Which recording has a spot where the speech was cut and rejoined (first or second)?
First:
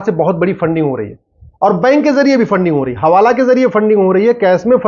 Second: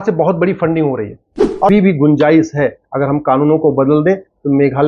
second